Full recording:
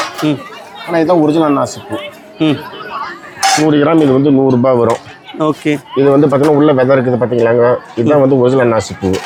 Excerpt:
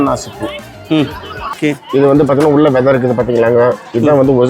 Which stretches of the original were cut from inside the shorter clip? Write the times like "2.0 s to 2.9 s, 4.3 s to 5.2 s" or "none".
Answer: 3.1 s to 5.6 s